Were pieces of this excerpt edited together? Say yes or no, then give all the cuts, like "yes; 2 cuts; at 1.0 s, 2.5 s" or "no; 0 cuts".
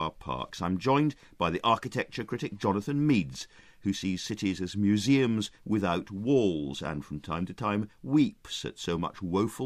no; 0 cuts